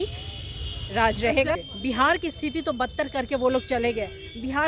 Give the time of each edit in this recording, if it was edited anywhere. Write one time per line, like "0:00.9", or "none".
0:01.7